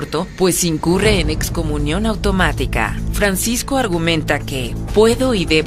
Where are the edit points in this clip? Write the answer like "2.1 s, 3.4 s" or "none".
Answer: 4.5 s